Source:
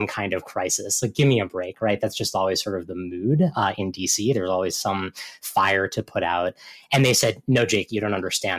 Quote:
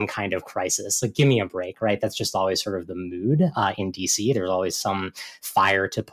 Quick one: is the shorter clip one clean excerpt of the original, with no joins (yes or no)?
yes